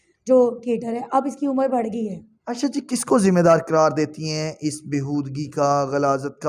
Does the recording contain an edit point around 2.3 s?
no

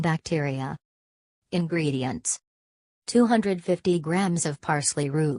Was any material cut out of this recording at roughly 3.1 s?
no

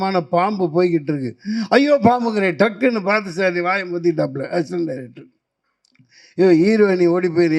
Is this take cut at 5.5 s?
no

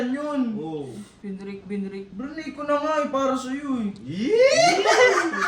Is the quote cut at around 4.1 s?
no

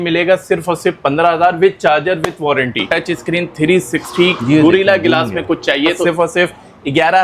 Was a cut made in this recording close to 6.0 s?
yes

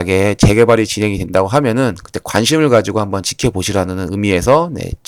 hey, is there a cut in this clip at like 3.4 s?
no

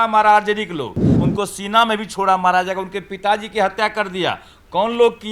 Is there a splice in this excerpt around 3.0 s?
no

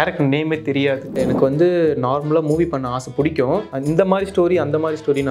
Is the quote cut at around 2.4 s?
no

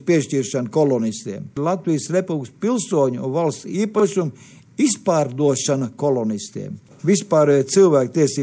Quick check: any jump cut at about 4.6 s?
no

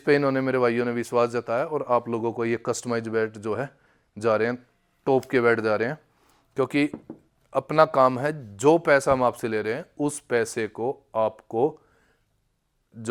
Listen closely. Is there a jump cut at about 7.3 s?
no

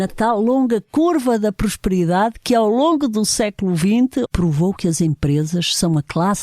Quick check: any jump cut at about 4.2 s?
yes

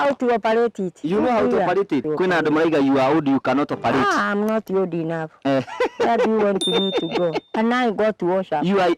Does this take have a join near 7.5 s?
yes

